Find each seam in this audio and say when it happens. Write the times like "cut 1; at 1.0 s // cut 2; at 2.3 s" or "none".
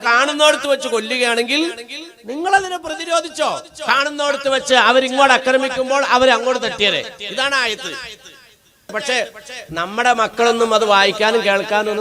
cut 1; at 8.9 s